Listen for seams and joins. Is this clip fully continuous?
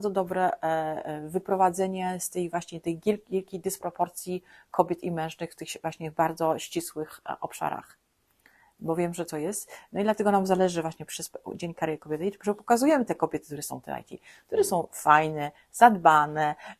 yes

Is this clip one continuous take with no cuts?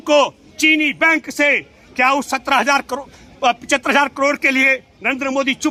yes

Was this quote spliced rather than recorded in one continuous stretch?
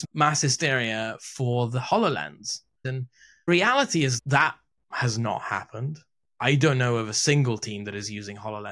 yes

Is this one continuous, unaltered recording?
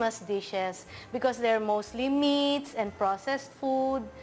yes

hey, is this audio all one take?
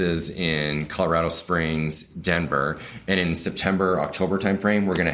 yes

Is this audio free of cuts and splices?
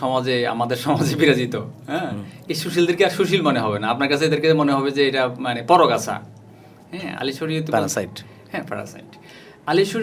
yes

